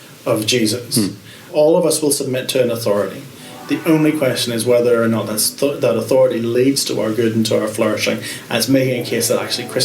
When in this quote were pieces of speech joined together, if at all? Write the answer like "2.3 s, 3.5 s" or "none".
1.5 s